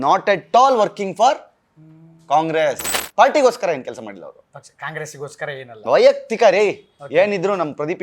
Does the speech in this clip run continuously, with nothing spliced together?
no; 1 cut; at 2.9 s

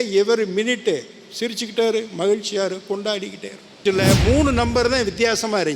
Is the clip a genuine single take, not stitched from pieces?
no; 1 cut; at 3.8 s

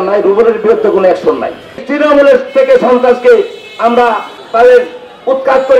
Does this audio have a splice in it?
yes; 1 cut; at 1.8 s

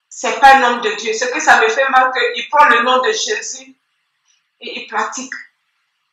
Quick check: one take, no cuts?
yes; 0 cuts

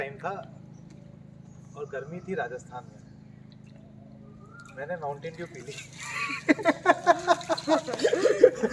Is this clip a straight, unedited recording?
yes; 0 cuts

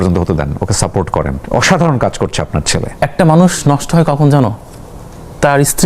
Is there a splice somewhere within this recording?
yes; 2 cuts; at 1.4 s, 2.8 s

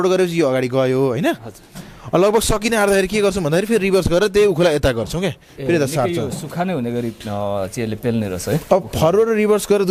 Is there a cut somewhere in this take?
no; 0 cuts

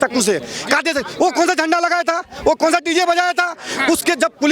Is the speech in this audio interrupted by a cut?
no; 0 cuts

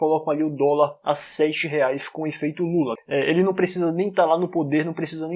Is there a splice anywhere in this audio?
no; 0 cuts

